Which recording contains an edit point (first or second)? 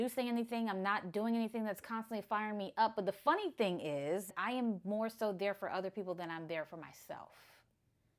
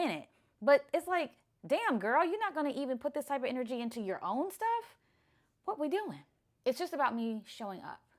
first